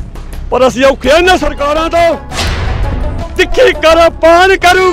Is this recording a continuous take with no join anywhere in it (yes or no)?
no